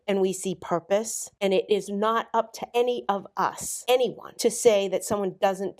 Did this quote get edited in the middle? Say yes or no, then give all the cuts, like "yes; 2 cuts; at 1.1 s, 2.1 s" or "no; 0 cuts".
yes; 4 cuts; at 1.3 s, 2.6 s, 3.7 s, 4.2 s